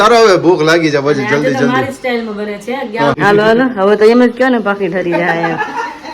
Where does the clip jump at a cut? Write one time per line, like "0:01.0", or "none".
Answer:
0:03.2